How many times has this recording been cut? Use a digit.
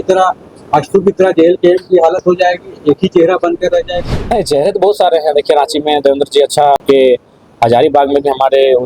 1